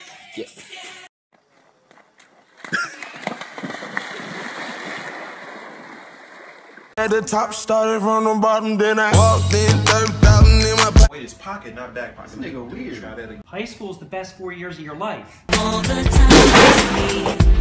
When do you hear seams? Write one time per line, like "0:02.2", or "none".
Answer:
none